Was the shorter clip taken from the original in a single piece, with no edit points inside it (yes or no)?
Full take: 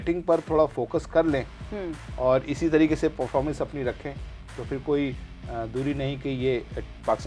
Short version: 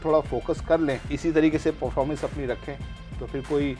no